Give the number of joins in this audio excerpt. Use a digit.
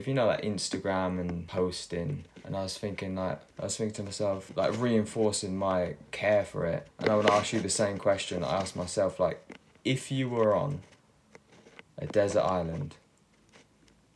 5